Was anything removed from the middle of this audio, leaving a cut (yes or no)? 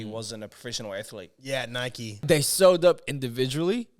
yes